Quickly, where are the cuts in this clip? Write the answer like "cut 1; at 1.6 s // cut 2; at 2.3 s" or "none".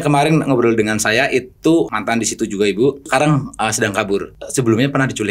cut 1; at 1.9 s // cut 2; at 3.1 s // cut 3; at 4.4 s